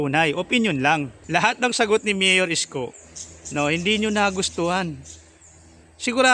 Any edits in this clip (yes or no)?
yes